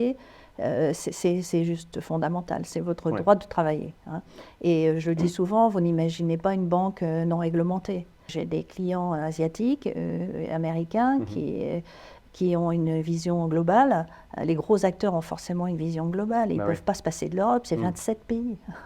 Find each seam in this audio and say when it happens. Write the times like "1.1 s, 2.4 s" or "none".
8.3 s